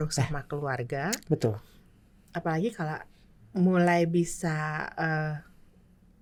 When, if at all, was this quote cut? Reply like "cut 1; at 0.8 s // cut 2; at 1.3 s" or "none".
none